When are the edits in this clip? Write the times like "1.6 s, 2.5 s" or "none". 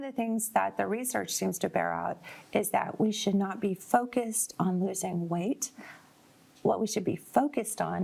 none